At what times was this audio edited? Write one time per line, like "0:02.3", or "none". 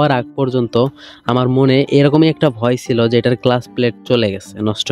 none